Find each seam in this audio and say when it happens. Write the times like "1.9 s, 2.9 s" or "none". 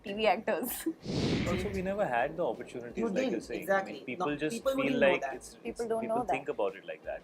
1.4 s